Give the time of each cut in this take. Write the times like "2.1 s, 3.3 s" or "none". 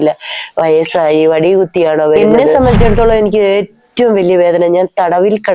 2.4 s